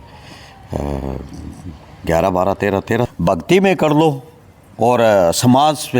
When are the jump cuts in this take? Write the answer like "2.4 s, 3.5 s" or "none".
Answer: 3.1 s